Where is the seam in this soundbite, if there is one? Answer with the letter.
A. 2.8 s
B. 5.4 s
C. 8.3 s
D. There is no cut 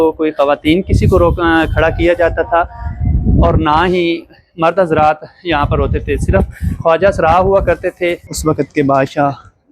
C